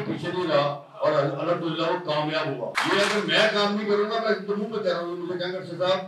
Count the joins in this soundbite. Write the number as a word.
one